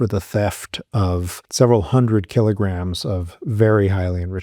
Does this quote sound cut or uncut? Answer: cut